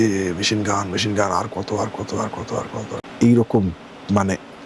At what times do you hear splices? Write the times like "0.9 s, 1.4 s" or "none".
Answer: 3.0 s